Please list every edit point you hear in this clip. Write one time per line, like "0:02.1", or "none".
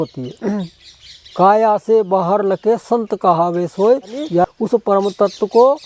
0:04.5